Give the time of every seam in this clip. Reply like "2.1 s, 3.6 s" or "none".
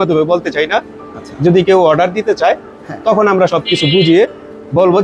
none